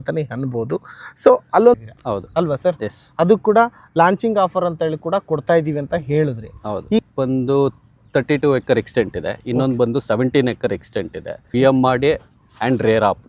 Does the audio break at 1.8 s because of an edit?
yes; 3 cuts; at 1.8 s, 7.0 s, 11.4 s

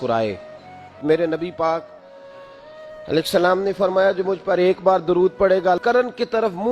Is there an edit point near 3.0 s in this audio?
no; 2 cuts; at 1.0 s, 5.8 s

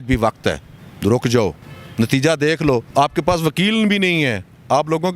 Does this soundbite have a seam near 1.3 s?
no; 1 cut; at 2.9 s

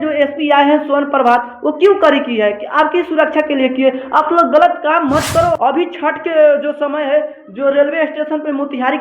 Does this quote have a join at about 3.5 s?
no; 1 cut; at 5.6 s

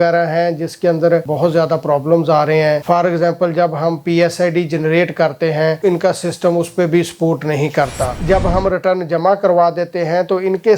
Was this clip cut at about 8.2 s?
yes; 3 cuts; at 1.2 s, 5.8 s, 8.2 s

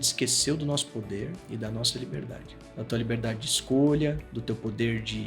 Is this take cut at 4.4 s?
no; 1 cut; at 2.5 s

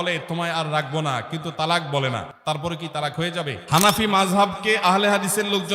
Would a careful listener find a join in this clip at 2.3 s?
no; 1 cut; at 3.6 s

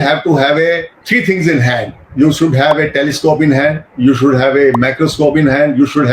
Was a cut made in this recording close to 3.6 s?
no; 1 cut; at 0.9 s

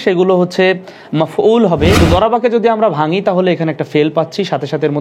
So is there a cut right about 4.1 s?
no; 1 cut; at 2.0 s

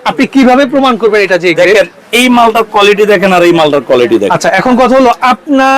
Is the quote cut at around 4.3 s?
yes; 1 cut; at 4.3 s

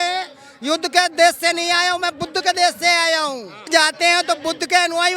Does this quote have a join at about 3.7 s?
yes; 1 cut; at 3.7 s

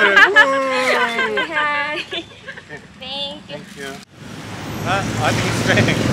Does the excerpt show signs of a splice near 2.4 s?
no; 1 cut; at 4.1 s

